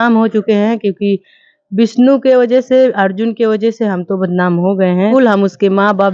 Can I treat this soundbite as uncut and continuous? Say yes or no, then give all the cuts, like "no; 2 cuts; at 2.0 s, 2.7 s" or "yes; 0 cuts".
no; 1 cut; at 5.1 s